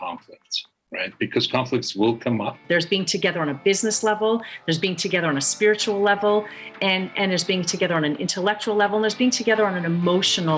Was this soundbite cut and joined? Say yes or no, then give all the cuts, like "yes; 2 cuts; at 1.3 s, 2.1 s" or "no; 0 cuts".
yes; 1 cut; at 2.6 s